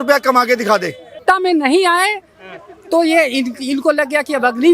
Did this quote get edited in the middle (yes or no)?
yes